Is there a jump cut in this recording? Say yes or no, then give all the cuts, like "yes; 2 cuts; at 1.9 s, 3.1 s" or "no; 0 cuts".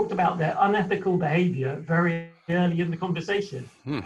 no; 0 cuts